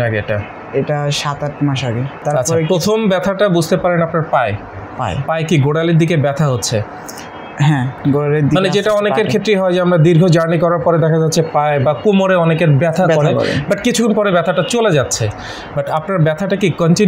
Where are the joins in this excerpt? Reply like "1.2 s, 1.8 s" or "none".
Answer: 2.1 s